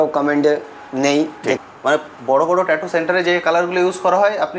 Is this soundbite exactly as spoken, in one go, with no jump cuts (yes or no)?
no